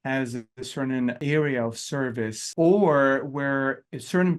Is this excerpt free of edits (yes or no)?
no